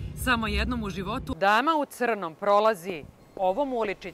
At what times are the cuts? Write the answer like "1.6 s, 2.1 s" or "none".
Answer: 1.3 s